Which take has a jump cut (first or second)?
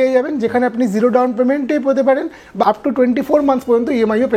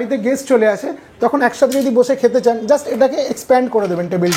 first